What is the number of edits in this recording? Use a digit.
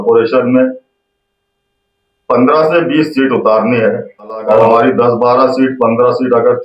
1